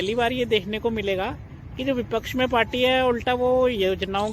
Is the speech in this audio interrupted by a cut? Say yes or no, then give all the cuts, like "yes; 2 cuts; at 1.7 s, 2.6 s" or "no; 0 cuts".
no; 0 cuts